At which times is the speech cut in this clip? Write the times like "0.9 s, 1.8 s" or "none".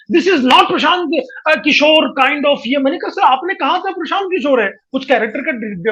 4.8 s